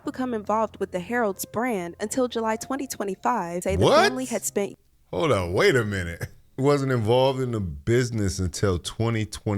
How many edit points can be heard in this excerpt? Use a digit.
2